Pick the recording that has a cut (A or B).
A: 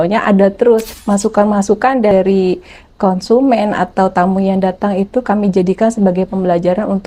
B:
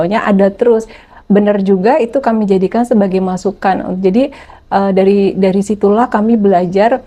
A